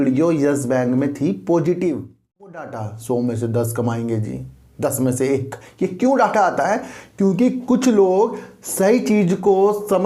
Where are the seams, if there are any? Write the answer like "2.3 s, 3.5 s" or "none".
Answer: 2.5 s